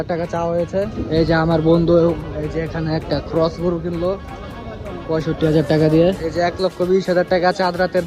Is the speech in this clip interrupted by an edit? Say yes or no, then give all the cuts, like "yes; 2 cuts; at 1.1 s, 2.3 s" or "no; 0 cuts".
yes; 2 cuts; at 1.0 s, 6.3 s